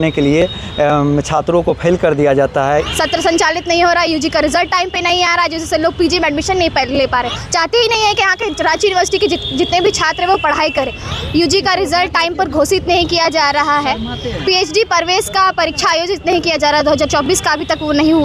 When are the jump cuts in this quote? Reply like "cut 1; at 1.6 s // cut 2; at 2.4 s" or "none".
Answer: cut 1; at 2.9 s // cut 2; at 7.4 s // cut 3; at 11.0 s

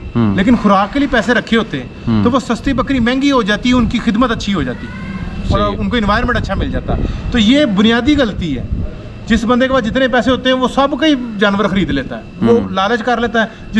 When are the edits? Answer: none

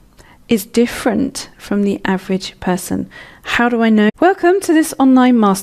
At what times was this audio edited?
none

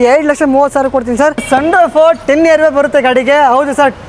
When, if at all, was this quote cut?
cut 1; at 1.4 s

